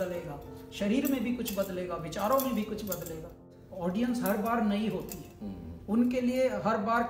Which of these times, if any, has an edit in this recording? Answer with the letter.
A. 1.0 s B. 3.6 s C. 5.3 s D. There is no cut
B